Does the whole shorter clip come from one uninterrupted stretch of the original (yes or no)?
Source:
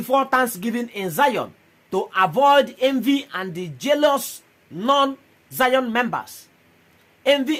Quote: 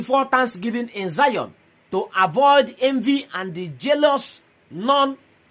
yes